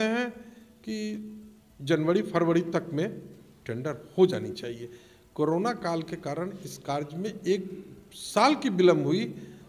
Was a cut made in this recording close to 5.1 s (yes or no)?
no